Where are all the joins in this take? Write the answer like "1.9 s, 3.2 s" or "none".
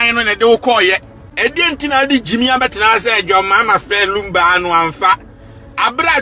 1.2 s